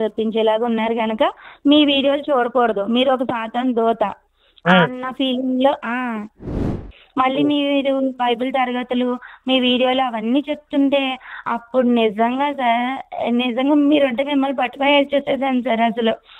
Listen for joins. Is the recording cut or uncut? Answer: cut